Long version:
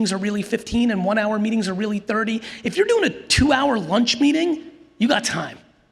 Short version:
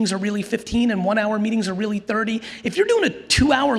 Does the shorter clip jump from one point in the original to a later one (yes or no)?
no